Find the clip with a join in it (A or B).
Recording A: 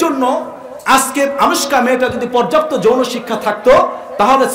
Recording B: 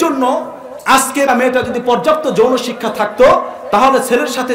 B